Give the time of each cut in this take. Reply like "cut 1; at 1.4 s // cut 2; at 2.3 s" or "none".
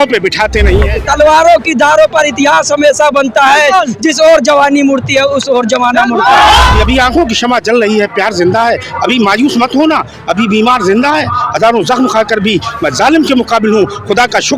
cut 1; at 1.0 s // cut 2; at 6.7 s